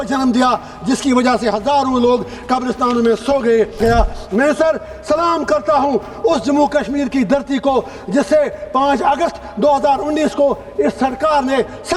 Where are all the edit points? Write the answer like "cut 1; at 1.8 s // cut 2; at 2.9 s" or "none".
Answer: cut 1; at 3.8 s